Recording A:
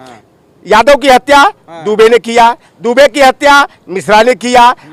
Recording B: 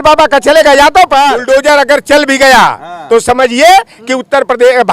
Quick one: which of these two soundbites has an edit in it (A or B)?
B